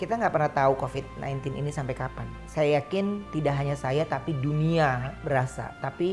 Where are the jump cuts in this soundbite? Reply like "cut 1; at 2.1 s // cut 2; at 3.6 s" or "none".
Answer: cut 1; at 2.3 s // cut 2; at 5.1 s